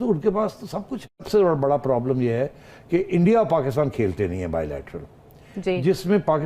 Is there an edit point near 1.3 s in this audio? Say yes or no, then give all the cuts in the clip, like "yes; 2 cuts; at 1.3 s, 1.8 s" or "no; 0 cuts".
yes; 1 cut; at 1.3 s